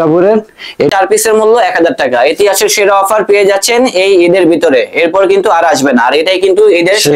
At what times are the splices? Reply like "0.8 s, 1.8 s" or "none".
1.0 s